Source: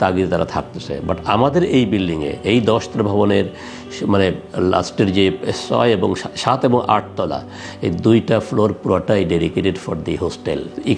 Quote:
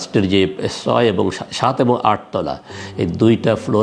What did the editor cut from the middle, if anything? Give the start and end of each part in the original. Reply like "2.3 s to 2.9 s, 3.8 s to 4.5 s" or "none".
none